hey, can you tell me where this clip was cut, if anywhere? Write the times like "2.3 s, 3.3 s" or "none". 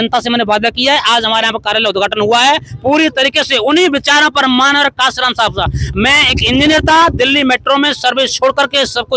none